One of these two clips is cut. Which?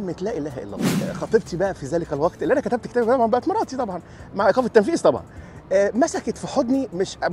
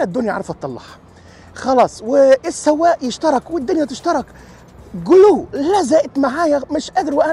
first; 1 cut; at 1.1 s

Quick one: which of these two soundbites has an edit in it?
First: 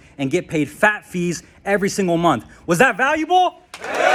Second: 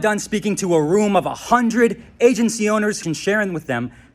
second; 1 cut; at 3.0 s

